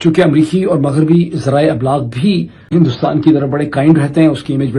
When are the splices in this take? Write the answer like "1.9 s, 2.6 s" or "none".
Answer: 2.7 s